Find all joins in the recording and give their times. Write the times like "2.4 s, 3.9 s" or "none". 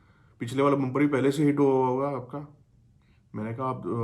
none